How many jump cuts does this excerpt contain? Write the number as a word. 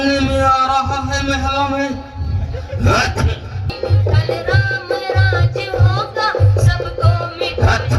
one